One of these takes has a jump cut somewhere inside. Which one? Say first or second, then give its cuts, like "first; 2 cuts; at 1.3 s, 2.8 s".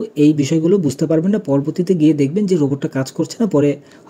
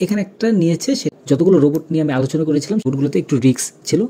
second; 2 cuts; at 1.2 s, 2.9 s